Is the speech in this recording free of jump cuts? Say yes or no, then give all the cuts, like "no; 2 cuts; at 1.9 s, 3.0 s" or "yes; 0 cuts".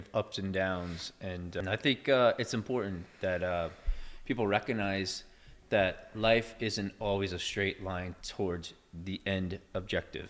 no; 1 cut; at 1.6 s